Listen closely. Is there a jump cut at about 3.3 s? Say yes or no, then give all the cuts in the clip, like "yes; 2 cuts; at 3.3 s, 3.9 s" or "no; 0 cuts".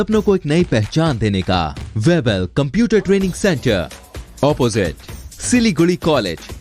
no; 1 cut; at 1.8 s